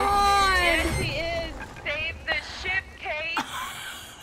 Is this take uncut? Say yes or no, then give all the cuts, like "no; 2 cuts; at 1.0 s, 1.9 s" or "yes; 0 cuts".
no; 1 cut; at 1.7 s